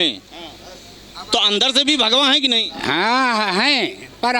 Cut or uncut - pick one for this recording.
uncut